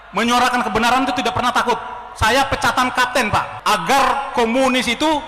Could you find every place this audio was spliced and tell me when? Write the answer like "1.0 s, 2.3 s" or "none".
3.5 s